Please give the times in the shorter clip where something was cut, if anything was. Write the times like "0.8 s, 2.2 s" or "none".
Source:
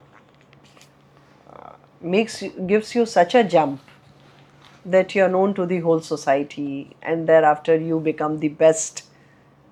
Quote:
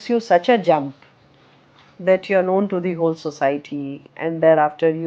none

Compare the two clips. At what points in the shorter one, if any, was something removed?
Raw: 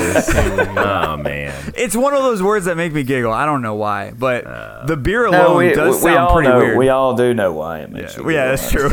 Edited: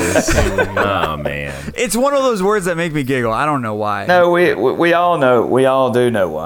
4.1 s

